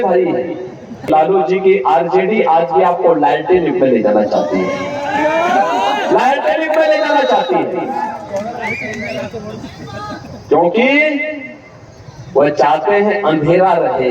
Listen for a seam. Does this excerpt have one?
yes; 1 cut; at 1.1 s

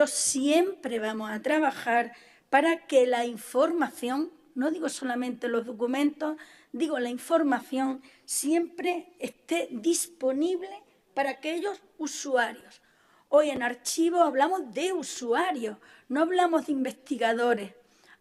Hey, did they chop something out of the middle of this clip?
no; 0 cuts

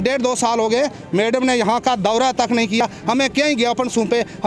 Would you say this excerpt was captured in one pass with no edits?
yes; 0 cuts

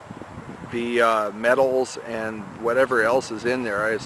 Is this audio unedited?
yes; 0 cuts

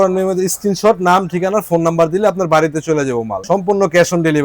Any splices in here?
yes; 1 cut; at 3.4 s

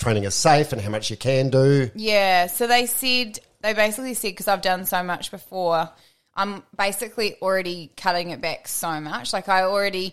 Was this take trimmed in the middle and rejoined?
no; 0 cuts

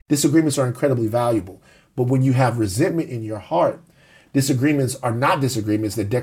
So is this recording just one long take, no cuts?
yes; 0 cuts

